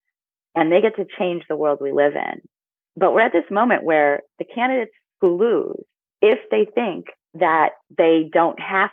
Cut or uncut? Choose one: uncut